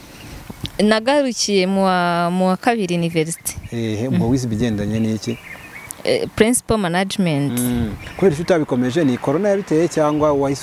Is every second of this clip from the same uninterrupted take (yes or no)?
yes